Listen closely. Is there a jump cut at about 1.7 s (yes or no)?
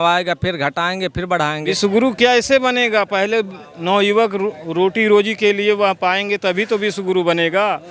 yes